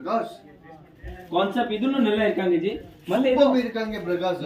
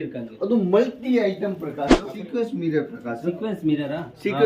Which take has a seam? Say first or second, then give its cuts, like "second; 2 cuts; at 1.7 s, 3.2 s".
second; 1 cut; at 2.1 s